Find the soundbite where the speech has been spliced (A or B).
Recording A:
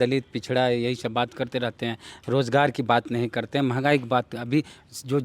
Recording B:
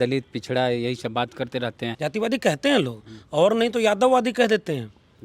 B